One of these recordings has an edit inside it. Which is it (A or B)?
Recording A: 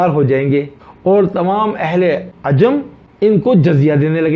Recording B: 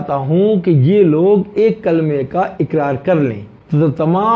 A